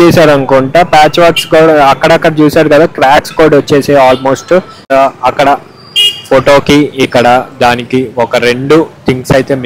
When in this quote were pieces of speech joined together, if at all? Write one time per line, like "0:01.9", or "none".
0:04.8

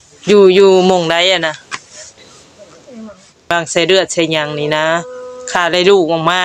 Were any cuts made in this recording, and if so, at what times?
0:03.5

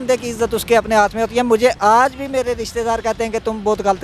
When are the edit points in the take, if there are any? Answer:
none

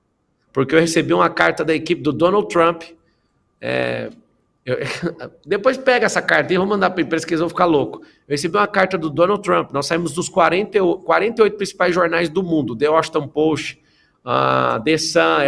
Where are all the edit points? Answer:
none

